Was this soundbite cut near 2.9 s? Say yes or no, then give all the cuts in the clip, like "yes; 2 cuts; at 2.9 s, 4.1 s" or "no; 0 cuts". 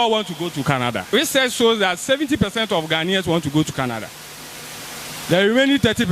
no; 1 cut; at 1.1 s